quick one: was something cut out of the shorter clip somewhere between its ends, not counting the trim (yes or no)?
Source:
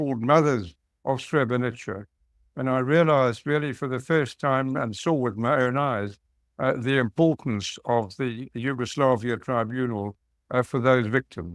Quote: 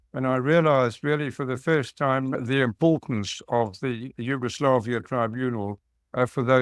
yes